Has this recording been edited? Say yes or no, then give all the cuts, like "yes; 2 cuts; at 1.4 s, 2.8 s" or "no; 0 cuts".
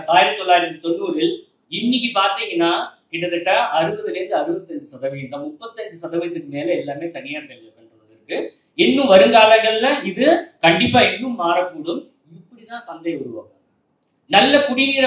no; 0 cuts